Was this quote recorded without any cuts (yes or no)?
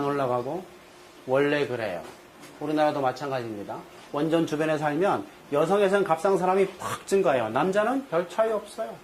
yes